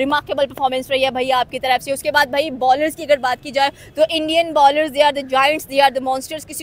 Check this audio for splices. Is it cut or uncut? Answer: uncut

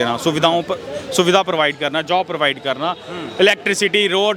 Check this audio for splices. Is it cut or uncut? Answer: uncut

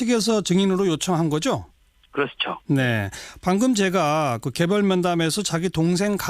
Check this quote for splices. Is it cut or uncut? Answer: cut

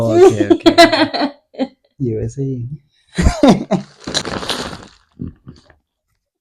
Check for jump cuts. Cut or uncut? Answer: uncut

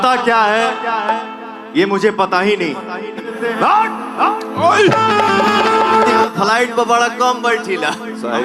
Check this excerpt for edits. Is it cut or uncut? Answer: cut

